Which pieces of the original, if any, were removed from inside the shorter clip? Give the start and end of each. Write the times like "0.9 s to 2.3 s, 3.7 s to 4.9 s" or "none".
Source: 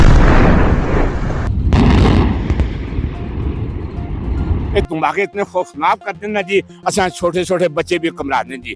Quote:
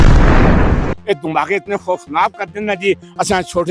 0.9 s to 4.6 s